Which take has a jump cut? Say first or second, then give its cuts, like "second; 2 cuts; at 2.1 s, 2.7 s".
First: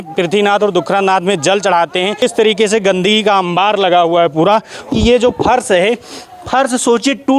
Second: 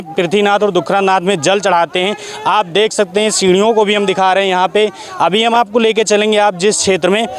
first; 2 cuts; at 2.2 s, 4.9 s